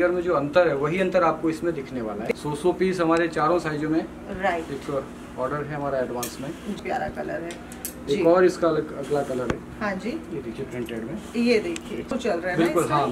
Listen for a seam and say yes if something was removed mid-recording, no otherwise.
yes